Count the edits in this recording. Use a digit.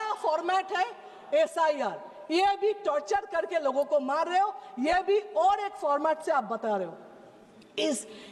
0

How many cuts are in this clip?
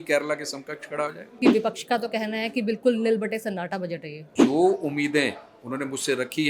2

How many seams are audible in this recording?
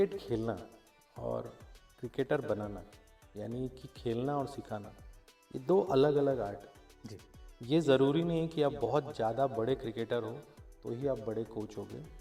0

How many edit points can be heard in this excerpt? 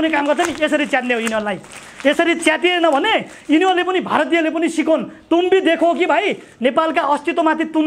0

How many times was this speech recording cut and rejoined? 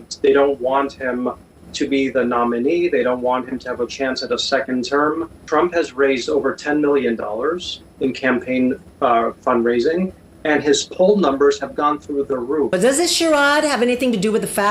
2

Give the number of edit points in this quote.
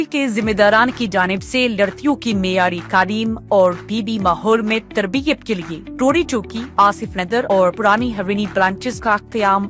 0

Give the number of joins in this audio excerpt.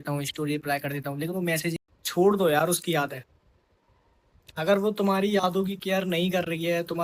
1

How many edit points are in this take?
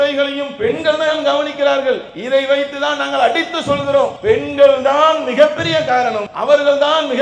3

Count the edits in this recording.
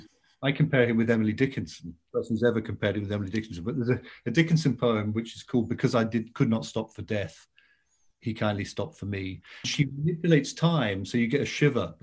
2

